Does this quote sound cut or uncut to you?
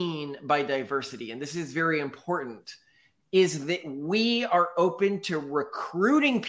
uncut